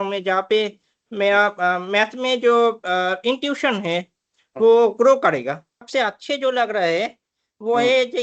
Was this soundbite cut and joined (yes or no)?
yes